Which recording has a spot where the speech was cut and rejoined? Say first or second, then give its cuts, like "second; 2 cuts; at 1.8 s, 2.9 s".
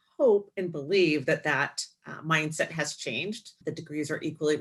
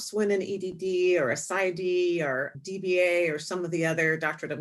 first; 1 cut; at 3.5 s